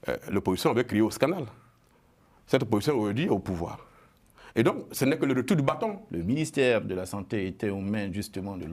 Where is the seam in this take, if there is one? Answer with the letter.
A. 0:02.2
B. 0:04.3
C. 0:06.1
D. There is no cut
C